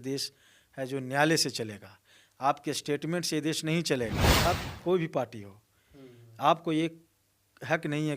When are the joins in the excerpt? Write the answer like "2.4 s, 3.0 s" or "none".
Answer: 4.4 s

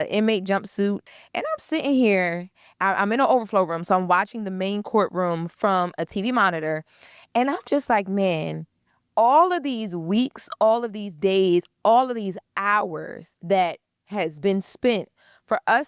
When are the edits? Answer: 1.1 s

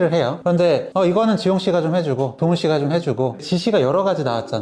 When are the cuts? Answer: 3.4 s

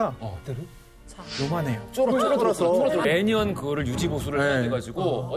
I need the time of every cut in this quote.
3.0 s

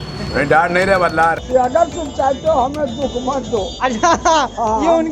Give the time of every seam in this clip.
1.4 s

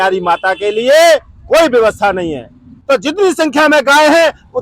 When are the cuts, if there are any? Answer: 2.7 s

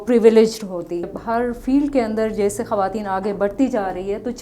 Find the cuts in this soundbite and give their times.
1.1 s

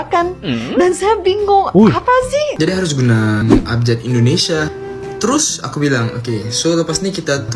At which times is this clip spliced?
2.5 s

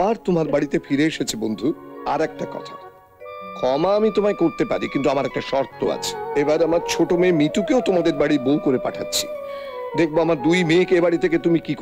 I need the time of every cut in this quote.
1.9 s, 6.1 s

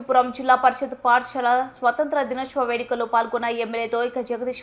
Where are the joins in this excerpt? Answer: none

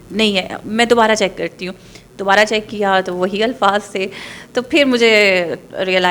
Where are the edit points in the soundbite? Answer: none

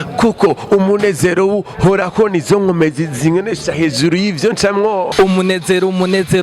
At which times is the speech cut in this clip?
5.1 s

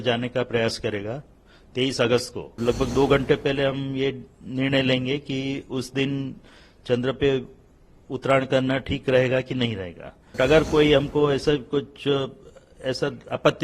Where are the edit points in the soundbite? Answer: 2.6 s, 10.4 s

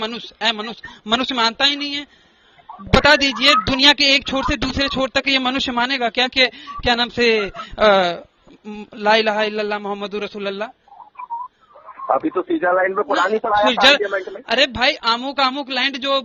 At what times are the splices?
none

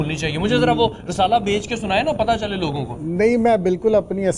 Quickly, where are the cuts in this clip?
none

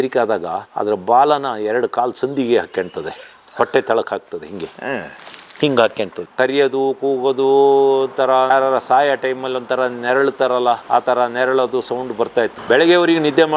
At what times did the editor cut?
6.2 s, 12.6 s

